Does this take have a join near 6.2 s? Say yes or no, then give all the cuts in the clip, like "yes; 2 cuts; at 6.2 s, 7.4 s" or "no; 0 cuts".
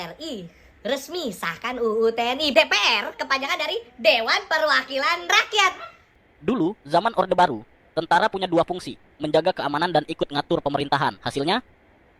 yes; 1 cut; at 6.2 s